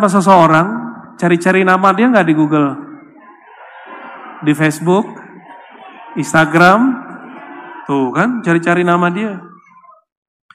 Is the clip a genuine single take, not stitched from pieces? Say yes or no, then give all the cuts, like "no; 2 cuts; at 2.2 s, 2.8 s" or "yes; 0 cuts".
yes; 0 cuts